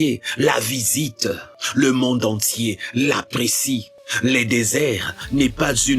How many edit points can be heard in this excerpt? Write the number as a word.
two